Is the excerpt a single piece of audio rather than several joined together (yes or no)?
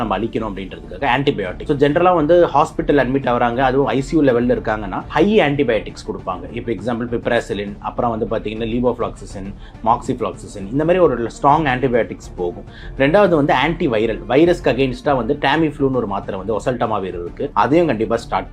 no